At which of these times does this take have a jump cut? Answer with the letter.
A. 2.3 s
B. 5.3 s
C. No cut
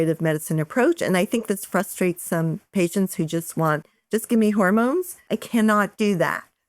B